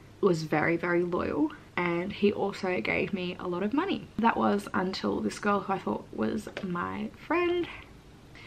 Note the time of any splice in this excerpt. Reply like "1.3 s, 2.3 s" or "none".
1.6 s, 4.1 s